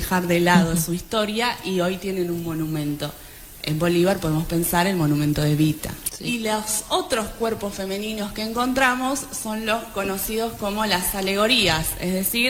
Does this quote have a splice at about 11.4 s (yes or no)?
no